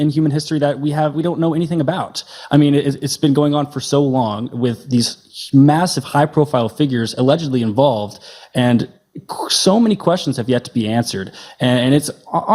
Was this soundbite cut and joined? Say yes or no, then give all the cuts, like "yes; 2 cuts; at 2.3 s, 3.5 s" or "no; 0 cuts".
no; 0 cuts